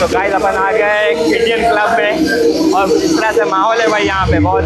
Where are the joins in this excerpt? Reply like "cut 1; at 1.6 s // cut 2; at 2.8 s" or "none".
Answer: none